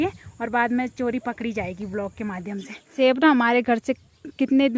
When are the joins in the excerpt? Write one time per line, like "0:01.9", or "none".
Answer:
none